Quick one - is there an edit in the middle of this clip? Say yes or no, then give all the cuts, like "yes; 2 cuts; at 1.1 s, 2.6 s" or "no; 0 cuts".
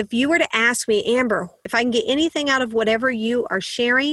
yes; 1 cut; at 1.6 s